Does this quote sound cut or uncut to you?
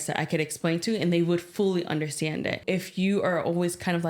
cut